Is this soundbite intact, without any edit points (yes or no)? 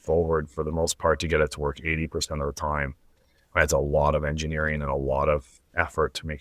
yes